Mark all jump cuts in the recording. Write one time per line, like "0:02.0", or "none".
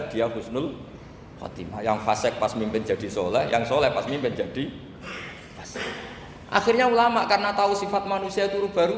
none

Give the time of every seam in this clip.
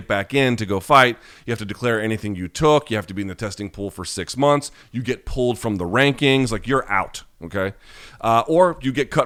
none

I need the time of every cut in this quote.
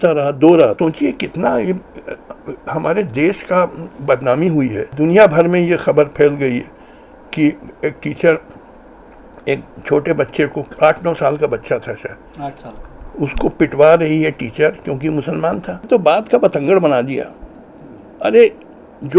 0:00.8
0:04.8
0:15.7

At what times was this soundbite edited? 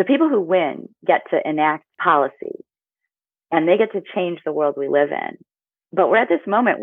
0:01.9

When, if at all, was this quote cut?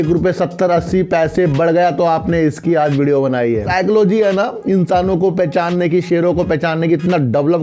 0:03.7

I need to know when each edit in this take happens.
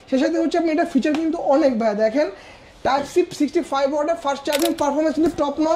0:04.6

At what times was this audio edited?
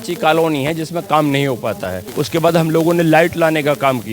0:02.0

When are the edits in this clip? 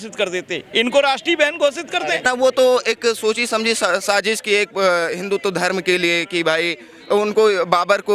0:02.2

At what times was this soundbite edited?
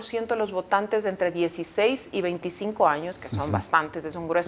none

